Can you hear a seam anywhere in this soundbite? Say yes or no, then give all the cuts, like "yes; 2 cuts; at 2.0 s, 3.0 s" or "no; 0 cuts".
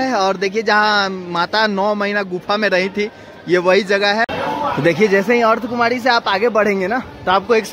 yes; 1 cut; at 4.2 s